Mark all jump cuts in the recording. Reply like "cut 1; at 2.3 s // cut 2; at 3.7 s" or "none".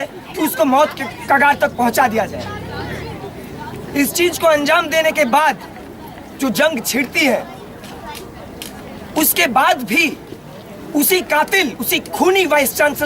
cut 1; at 5.8 s

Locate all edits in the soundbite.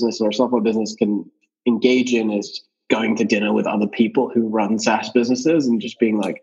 cut 1; at 1.4 s // cut 2; at 2.7 s

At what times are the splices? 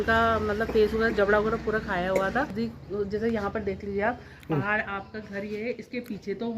cut 1; at 2.5 s

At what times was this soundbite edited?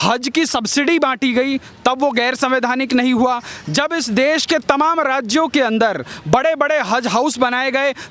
none

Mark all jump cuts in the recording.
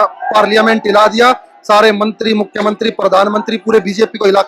none

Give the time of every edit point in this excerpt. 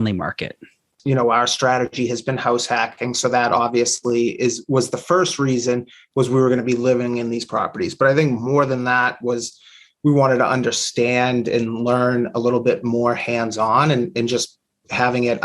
cut 1; at 0.9 s

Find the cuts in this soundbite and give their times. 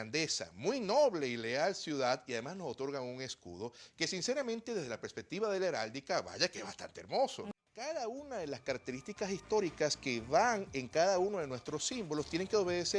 cut 1; at 7.4 s

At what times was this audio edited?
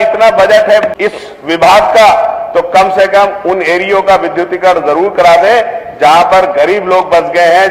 cut 1; at 0.9 s

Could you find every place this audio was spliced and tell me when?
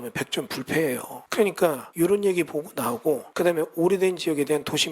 cut 1; at 1.2 s // cut 2; at 1.8 s // cut 3; at 3.3 s

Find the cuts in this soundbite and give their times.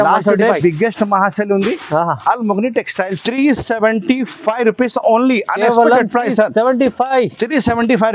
cut 1; at 3.2 s

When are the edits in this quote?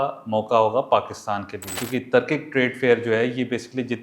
cut 1; at 1.7 s

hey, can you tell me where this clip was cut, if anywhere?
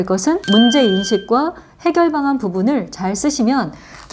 none

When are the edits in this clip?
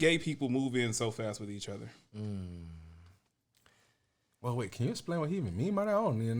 none

